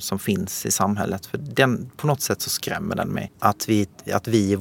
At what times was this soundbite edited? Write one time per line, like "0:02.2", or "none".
0:03.3